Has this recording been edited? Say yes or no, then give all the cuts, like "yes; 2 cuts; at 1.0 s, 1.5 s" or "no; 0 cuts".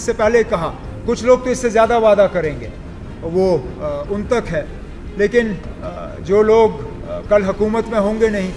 no; 0 cuts